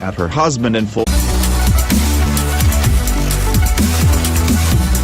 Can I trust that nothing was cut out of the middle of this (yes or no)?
no